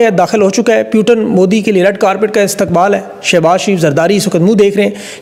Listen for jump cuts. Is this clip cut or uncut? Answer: uncut